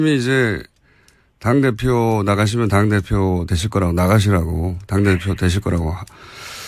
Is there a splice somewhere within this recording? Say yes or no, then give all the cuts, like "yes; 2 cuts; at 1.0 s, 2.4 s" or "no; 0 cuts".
no; 0 cuts